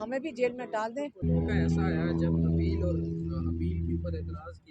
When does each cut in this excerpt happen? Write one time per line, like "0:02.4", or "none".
0:01.2